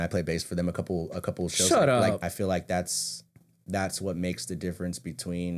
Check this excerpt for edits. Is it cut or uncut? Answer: cut